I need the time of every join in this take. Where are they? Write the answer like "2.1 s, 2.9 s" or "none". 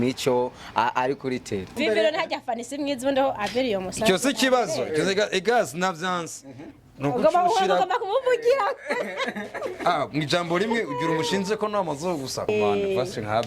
1.8 s, 12.5 s